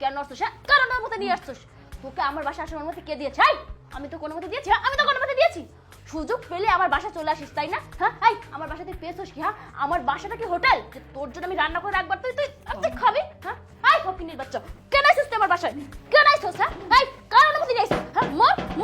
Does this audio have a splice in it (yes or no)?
no